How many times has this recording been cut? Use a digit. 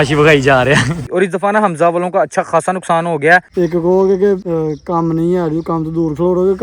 3